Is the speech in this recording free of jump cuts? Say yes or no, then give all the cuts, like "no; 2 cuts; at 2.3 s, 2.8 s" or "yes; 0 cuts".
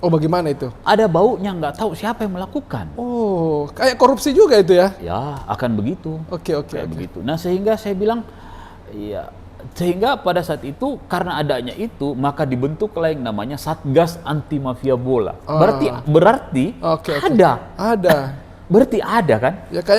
yes; 0 cuts